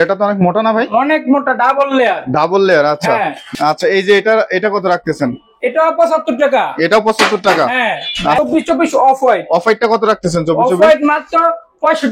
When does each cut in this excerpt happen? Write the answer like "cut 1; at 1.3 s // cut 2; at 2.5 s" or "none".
cut 1; at 3.4 s // cut 2; at 8.4 s